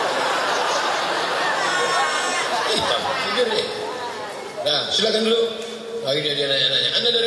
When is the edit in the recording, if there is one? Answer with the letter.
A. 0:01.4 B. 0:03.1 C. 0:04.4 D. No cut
D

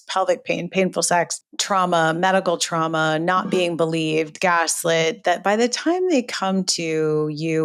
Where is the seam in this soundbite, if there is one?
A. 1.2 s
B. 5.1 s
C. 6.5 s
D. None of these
D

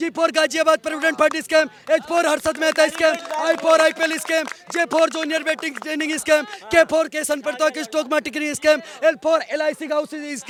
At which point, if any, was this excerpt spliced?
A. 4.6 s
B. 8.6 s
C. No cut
C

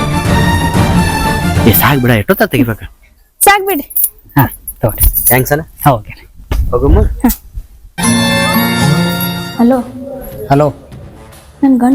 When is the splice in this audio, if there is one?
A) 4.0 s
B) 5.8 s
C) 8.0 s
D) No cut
C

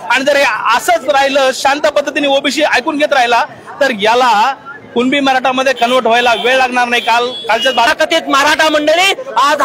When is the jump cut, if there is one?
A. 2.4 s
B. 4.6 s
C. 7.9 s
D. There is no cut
C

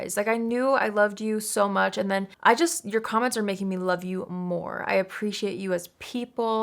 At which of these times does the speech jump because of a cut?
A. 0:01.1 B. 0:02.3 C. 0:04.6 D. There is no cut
B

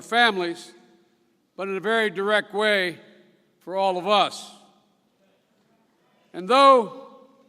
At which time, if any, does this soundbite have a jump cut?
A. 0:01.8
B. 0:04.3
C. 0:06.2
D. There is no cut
C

